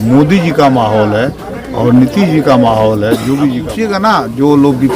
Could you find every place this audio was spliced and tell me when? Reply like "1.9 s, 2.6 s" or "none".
3.7 s